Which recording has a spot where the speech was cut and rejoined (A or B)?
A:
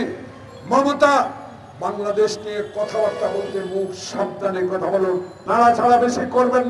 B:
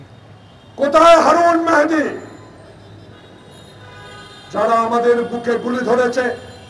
A